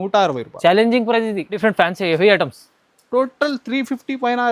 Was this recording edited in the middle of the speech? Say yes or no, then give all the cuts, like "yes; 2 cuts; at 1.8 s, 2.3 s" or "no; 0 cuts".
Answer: yes; 1 cut; at 1.6 s